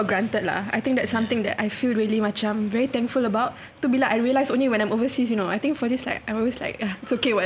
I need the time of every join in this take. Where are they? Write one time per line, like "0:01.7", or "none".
none